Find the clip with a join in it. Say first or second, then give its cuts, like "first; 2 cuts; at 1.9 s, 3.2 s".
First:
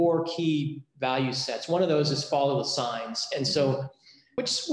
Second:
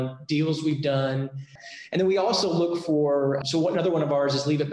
second; 1 cut; at 1.5 s